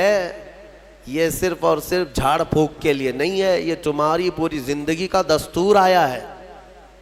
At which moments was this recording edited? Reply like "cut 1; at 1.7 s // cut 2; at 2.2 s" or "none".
none